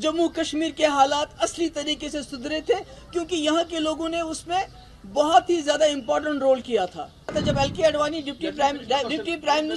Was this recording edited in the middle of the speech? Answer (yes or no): yes